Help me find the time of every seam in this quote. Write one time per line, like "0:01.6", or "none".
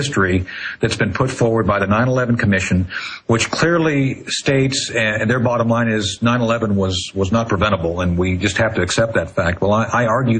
none